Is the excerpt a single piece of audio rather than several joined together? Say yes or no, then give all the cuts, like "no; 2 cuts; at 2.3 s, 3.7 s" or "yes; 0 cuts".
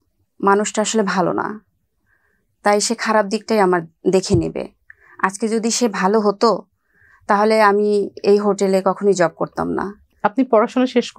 yes; 0 cuts